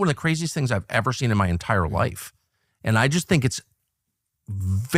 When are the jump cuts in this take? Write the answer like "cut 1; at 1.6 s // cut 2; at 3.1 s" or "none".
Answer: none

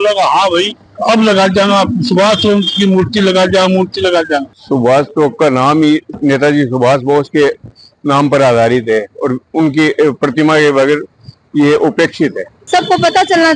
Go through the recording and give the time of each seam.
cut 1; at 4.5 s // cut 2; at 12.6 s

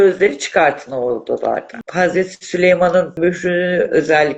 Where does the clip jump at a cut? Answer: cut 1; at 1.8 s // cut 2; at 3.2 s

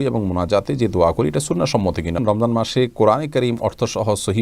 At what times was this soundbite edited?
cut 1; at 2.2 s

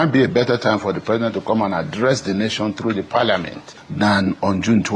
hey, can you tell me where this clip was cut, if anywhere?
none

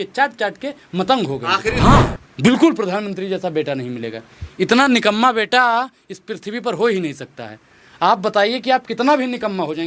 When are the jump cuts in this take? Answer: cut 1; at 1.8 s

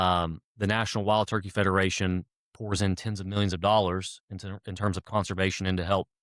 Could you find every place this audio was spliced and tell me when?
none

